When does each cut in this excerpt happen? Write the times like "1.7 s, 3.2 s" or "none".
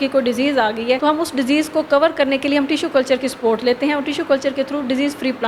1.0 s